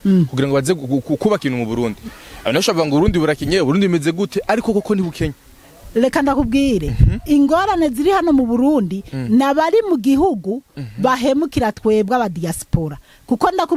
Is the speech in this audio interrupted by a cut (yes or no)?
no